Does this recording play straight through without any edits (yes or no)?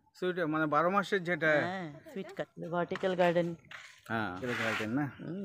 no